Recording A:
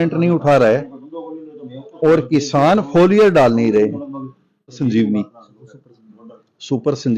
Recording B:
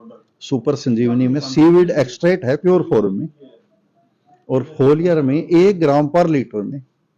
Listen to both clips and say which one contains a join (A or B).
A